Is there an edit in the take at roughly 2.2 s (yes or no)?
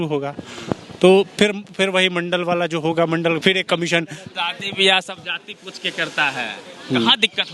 no